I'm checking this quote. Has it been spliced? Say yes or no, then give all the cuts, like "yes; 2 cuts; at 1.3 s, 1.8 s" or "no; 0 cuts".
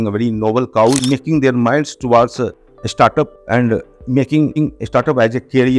yes; 1 cut; at 1.0 s